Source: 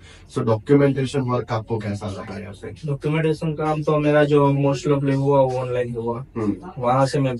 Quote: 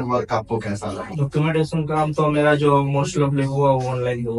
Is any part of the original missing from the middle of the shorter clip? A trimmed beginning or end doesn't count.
yes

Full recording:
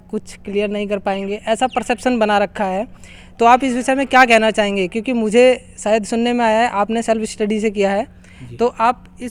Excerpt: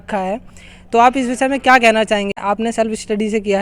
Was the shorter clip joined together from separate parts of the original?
yes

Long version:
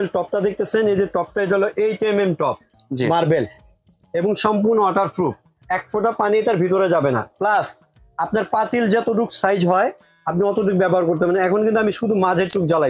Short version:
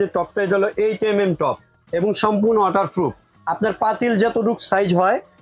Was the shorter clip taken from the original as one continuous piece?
no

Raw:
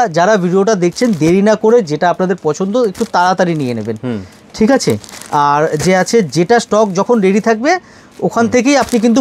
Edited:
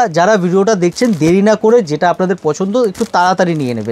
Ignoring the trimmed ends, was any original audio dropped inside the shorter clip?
no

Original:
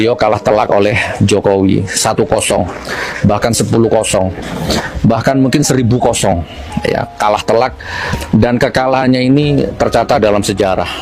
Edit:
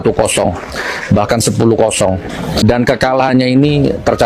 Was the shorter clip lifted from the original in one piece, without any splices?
no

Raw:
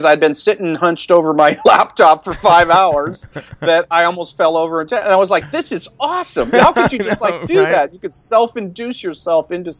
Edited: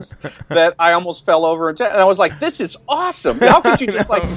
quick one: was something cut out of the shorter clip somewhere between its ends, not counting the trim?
no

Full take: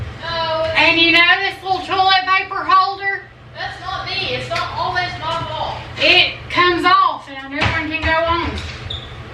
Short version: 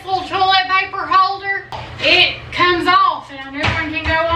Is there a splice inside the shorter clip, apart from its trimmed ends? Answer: yes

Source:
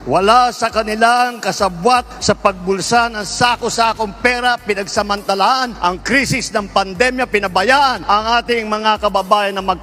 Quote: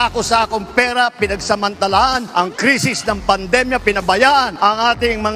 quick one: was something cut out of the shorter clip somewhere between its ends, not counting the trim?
no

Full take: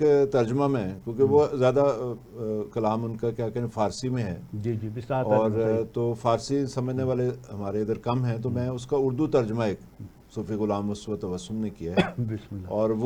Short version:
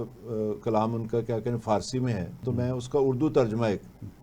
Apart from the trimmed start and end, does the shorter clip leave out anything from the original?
yes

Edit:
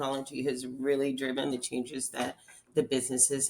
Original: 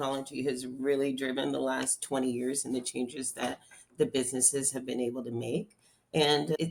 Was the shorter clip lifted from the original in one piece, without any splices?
no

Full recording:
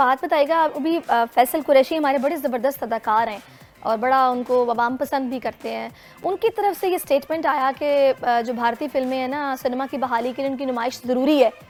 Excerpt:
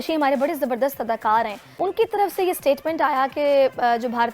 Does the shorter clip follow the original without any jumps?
no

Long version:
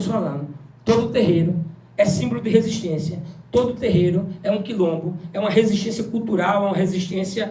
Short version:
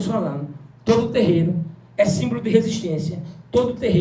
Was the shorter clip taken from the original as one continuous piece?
yes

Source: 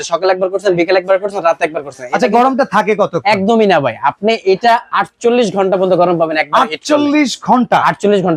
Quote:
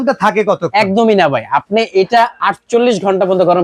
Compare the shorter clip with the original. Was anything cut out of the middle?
no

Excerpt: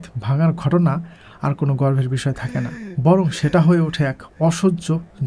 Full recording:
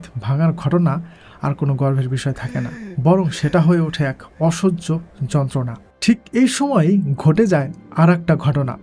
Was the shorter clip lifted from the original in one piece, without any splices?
yes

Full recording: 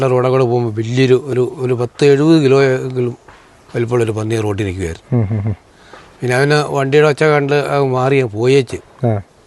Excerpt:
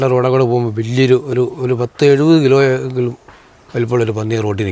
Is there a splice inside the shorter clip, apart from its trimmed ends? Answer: no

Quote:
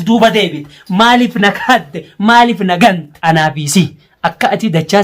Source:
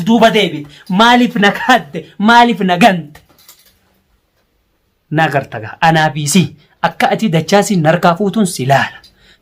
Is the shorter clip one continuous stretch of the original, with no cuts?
no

